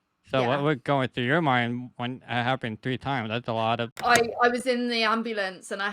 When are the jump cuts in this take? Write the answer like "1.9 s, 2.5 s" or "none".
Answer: 3.9 s